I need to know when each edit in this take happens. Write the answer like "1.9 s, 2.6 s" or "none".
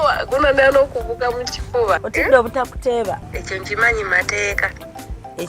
2.1 s, 3.3 s